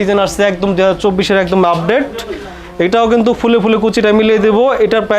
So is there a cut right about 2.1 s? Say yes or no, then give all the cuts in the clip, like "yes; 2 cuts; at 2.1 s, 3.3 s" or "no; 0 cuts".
no; 0 cuts